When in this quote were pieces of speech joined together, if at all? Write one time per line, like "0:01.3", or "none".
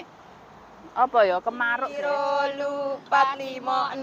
0:01.8